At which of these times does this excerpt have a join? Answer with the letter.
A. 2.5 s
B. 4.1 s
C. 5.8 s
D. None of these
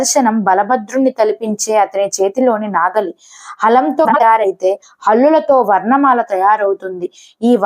B